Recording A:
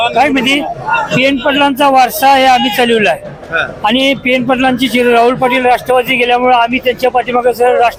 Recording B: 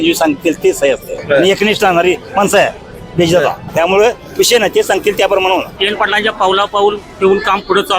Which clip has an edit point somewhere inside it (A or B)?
B